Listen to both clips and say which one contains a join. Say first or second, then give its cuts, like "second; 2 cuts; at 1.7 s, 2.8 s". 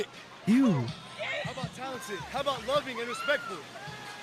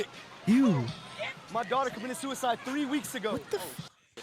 second; 1 cut; at 1.2 s